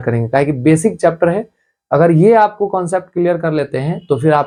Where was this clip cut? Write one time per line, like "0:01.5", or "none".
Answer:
none